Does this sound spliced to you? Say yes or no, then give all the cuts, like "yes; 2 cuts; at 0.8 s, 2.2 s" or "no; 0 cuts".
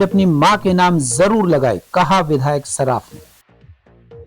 yes; 1 cut; at 3.3 s